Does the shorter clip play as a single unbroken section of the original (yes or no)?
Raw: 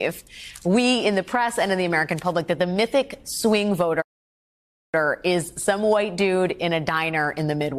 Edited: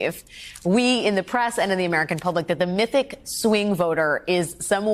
no